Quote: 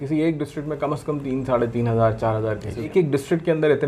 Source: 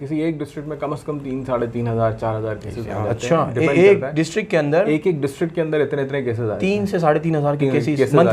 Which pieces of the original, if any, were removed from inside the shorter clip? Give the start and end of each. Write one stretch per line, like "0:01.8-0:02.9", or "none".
0:02.9-0:05.0